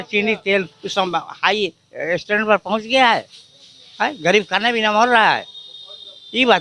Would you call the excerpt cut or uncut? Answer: uncut